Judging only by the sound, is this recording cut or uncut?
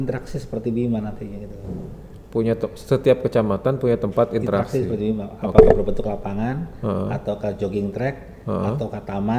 uncut